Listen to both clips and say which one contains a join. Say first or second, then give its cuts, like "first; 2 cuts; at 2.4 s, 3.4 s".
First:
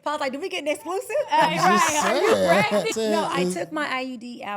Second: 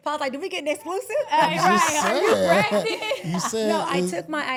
first; 1 cut; at 2.9 s